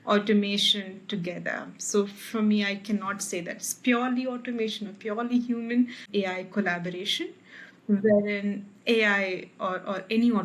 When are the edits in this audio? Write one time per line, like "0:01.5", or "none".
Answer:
0:06.1